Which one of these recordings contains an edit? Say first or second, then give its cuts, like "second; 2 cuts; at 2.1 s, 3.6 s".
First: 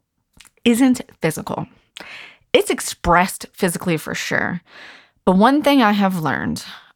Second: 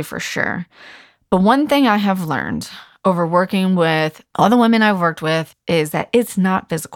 second; 2 cuts; at 4.2 s, 5.5 s